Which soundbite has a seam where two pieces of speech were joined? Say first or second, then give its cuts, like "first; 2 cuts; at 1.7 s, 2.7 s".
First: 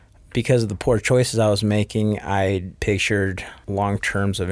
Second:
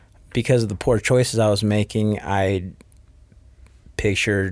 first; 2 cuts; at 2.7 s, 3.5 s